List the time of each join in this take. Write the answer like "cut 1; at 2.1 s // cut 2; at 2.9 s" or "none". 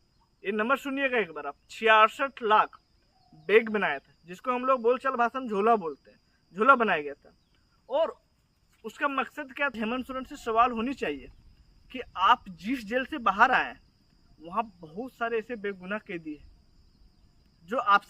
cut 1; at 9.8 s